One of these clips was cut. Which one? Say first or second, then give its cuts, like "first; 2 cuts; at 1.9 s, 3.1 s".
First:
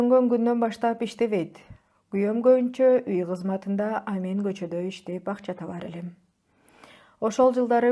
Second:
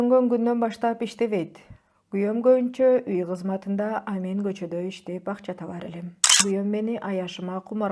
second; 1 cut; at 6.4 s